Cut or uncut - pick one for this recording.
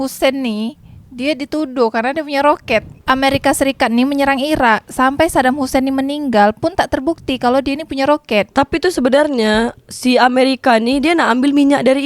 cut